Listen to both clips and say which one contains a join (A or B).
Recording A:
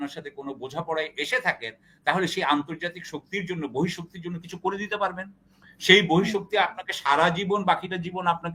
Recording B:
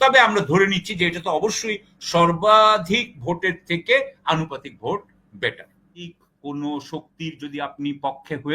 B